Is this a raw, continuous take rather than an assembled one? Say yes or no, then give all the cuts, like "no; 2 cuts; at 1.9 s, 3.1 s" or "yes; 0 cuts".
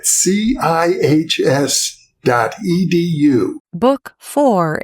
no; 1 cut; at 3.6 s